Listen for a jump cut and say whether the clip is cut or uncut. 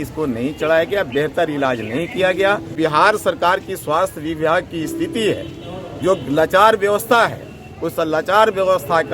cut